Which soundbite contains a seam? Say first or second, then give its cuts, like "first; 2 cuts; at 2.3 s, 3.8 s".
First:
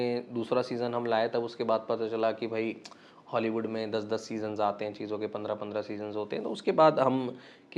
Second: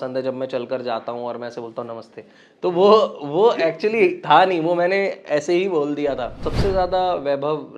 second; 1 cut; at 6.4 s